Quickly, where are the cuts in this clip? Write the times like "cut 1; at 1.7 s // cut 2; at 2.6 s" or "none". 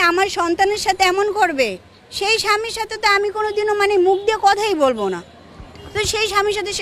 none